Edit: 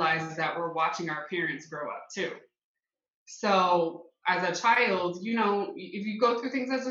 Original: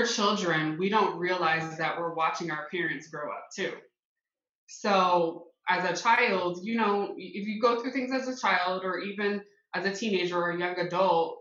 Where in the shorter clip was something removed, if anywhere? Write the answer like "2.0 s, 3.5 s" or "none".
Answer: none